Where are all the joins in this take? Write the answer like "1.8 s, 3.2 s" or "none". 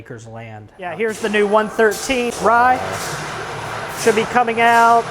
0.9 s, 2.3 s